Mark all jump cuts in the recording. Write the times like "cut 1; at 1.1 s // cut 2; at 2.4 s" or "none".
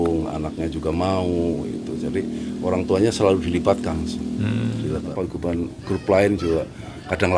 cut 1; at 5.1 s